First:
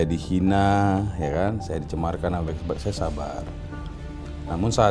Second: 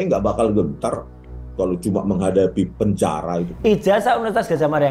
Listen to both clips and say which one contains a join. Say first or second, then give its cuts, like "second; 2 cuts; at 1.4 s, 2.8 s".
second; 1 cut; at 3.5 s